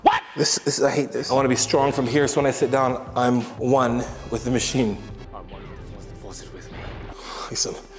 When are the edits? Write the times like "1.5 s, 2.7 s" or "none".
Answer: 1.2 s